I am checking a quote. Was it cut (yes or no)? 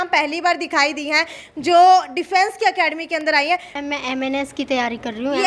yes